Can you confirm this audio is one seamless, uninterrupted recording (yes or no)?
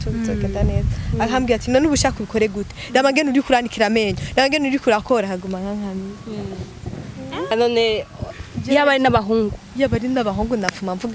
no